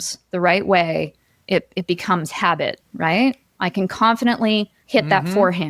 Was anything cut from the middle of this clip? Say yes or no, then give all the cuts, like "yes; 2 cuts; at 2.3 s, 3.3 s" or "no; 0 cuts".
yes; 2 cuts; at 2.8 s, 4.8 s